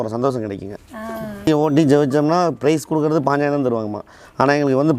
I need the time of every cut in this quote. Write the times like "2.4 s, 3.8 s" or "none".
1.5 s